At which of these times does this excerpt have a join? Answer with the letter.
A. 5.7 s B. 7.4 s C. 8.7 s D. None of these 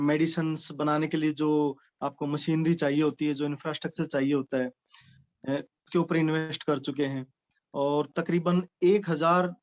D